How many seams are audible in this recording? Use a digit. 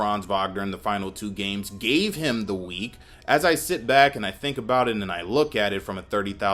1